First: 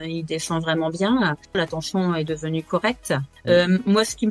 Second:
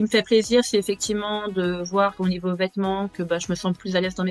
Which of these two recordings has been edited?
first; 2 cuts; at 1.6 s, 3.3 s

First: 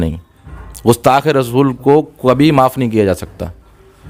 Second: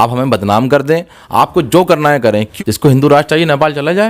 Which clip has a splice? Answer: second; 1 cut; at 2.5 s

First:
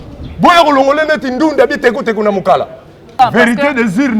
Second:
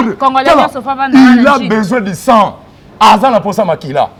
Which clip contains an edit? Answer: first; 1 cut; at 3.1 s

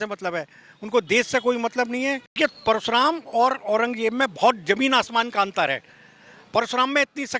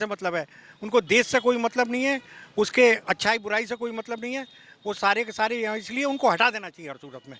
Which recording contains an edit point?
first; 1 cut; at 2.4 s

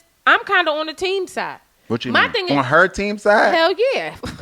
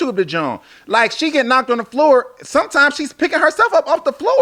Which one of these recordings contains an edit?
first; 1 cut; at 2.5 s

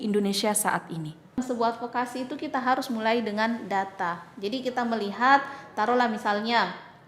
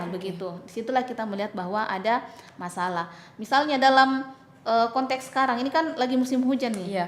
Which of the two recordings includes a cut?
first; 1 cut; at 1.4 s

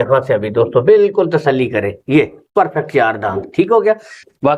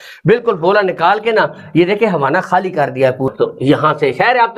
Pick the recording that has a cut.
second; 1 cut; at 3.3 s

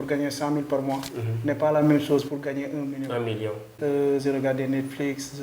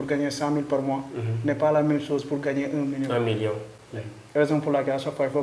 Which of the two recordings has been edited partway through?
first; 1 cut; at 3.7 s

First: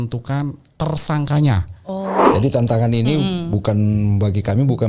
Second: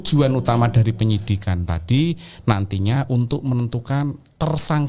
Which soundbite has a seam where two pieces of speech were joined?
first; 1 cut; at 2.2 s

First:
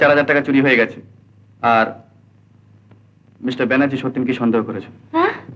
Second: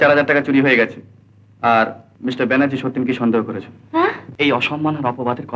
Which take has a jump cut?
second; 2 cuts; at 2.1 s, 4.2 s

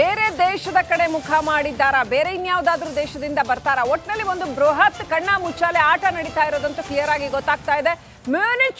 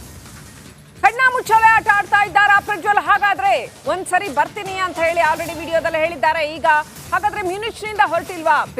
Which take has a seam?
second; 1 cut; at 0.9 s

